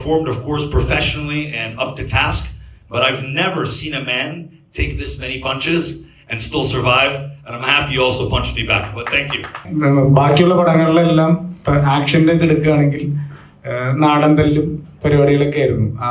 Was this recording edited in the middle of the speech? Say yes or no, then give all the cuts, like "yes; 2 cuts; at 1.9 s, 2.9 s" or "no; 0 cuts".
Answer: yes; 1 cut; at 9.6 s